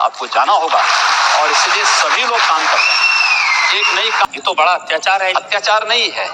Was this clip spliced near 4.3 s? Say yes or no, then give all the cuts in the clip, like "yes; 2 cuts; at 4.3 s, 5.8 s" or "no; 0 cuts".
yes; 1 cut; at 4.3 s